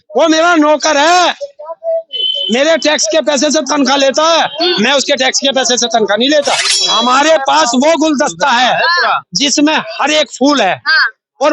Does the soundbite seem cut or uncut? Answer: cut